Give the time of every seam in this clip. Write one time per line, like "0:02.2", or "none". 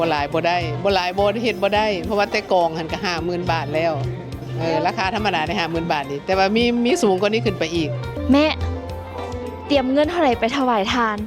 0:08.1